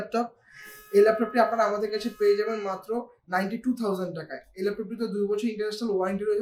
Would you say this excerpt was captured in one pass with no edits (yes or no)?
yes